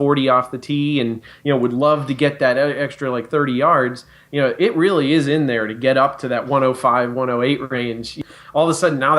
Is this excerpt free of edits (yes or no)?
no